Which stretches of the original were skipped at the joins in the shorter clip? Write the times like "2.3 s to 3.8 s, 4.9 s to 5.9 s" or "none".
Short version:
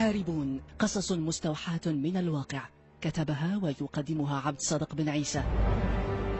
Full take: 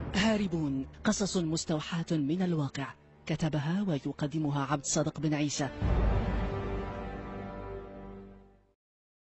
5.7 s to 5.9 s